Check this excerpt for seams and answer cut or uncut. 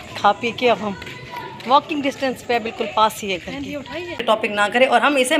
cut